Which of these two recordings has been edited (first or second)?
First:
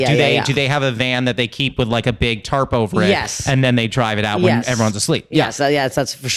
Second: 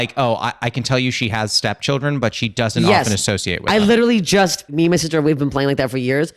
second